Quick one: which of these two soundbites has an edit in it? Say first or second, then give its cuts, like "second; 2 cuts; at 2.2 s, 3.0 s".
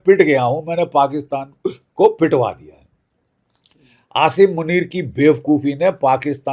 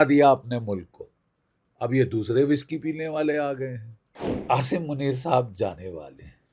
second; 1 cut; at 4.4 s